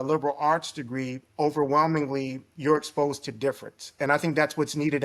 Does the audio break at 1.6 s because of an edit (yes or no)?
no